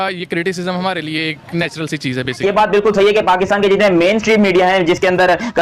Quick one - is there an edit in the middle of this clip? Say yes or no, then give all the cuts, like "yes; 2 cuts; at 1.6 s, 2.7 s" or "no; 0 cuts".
yes; 1 cut; at 2.4 s